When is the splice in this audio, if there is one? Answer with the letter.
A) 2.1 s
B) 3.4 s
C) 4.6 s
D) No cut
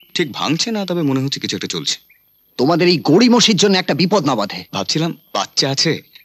C